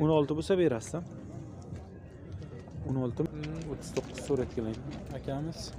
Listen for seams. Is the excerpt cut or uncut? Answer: cut